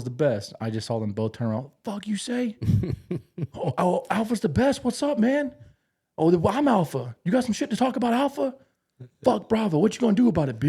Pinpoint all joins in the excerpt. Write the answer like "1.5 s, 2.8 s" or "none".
none